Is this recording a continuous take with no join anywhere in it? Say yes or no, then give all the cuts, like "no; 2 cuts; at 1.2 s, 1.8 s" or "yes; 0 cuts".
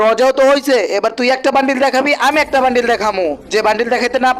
yes; 0 cuts